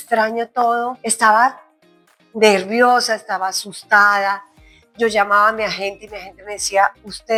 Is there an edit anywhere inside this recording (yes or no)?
no